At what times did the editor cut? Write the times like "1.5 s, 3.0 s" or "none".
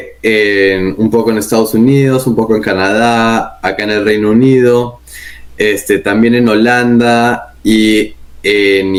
none